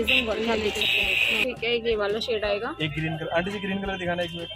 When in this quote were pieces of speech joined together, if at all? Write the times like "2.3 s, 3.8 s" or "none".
1.4 s